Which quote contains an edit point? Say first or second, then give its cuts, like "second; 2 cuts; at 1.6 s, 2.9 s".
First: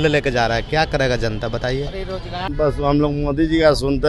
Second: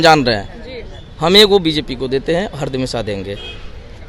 first; 1 cut; at 2.5 s